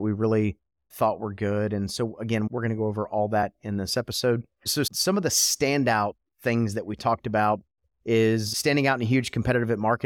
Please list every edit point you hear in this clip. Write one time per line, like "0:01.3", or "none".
0:08.5